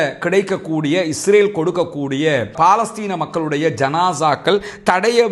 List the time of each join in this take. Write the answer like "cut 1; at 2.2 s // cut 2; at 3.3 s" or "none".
none